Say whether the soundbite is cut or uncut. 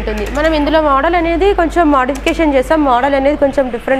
uncut